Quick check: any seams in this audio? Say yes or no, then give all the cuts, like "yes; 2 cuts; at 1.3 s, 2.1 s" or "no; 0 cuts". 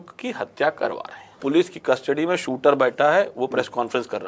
yes; 1 cut; at 1.4 s